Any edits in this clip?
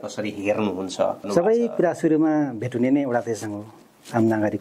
yes; 1 cut; at 1.3 s

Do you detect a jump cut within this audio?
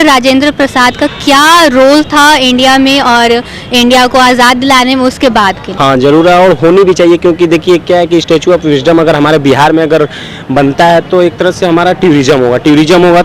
yes; 1 cut; at 5.7 s

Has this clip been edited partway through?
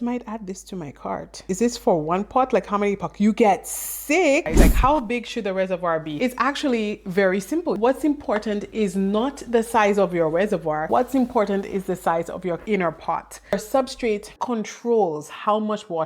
yes; 5 cuts; at 1.4 s, 4.6 s, 7.8 s, 10.8 s, 13.4 s

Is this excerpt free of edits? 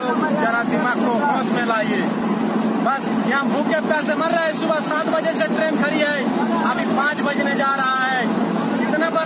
yes; 0 cuts

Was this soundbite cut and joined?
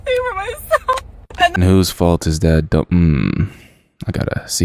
yes; 1 cut; at 1.5 s

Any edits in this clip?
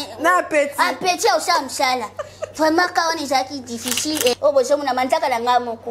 yes; 1 cut; at 4.3 s

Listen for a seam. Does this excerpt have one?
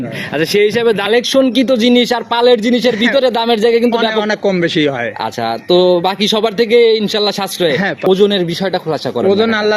yes; 2 cuts; at 1.0 s, 8.1 s

